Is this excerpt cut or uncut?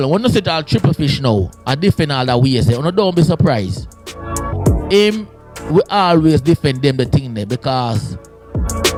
uncut